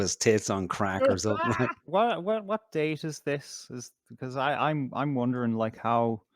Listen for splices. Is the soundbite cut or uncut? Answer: cut